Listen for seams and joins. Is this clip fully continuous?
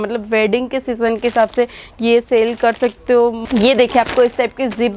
no; 1 cut; at 3.4 s

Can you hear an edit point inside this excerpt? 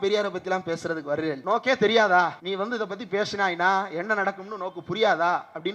yes; 2 cuts; at 1.4 s, 2.4 s

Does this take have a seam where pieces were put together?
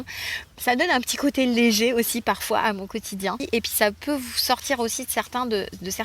yes; 1 cut; at 3.4 s

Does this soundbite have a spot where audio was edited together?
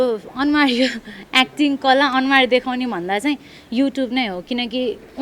no; 0 cuts

